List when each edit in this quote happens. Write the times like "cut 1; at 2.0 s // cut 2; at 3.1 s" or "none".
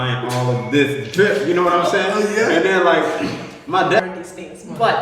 cut 1; at 4.0 s